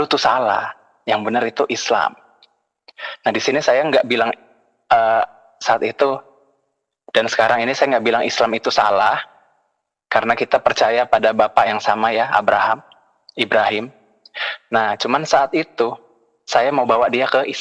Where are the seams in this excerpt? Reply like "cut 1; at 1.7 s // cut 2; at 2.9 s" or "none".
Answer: none